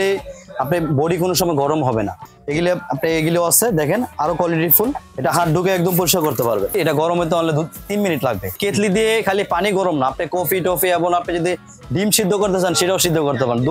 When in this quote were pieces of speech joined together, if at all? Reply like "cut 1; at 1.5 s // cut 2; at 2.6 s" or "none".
cut 1; at 2.3 s // cut 2; at 5.1 s // cut 3; at 6.7 s // cut 4; at 8.6 s